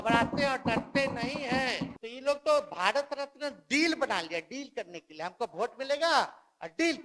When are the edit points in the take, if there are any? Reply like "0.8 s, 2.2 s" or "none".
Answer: 1.9 s